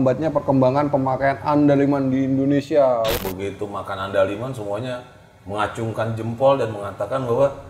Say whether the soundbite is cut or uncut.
cut